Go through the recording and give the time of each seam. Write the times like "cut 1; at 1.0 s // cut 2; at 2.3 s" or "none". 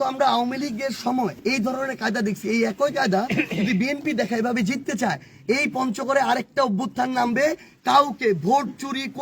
cut 1; at 1.4 s